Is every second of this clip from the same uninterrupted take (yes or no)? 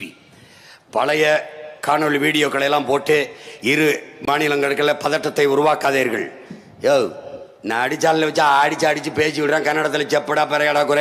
yes